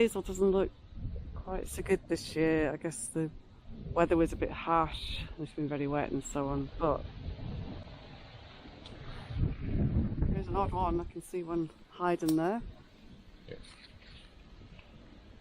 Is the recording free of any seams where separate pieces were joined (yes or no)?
yes